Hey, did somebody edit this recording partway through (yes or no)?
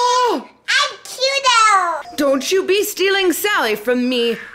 yes